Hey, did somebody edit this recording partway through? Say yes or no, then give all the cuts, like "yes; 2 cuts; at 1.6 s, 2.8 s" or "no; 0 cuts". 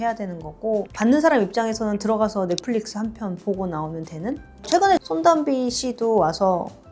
yes; 2 cuts; at 0.8 s, 4.7 s